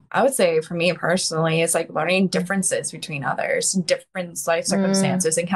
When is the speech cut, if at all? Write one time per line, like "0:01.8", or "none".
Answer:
none